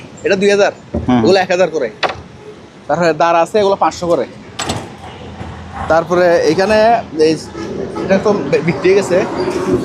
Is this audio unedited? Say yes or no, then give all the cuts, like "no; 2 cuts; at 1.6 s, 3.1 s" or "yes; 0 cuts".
yes; 0 cuts